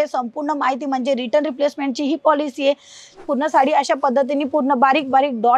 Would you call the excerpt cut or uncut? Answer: cut